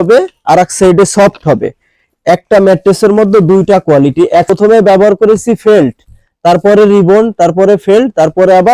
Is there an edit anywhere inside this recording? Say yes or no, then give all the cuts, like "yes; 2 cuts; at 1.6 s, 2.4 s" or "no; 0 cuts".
yes; 2 cuts; at 2.0 s, 4.5 s